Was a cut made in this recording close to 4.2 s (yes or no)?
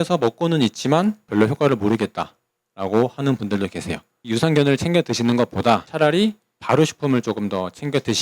yes